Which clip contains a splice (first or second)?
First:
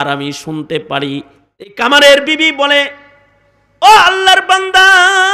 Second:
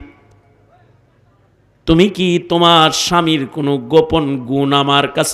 first